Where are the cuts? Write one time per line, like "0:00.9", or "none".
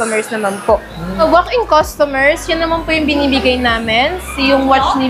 0:01.1